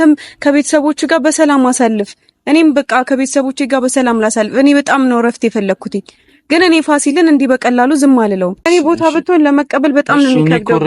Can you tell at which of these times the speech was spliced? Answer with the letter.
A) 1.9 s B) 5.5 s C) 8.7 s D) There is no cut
C